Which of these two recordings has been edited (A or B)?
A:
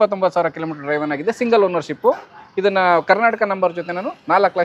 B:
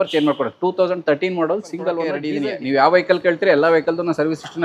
B